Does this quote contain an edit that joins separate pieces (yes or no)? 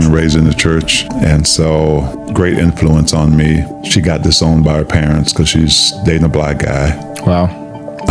no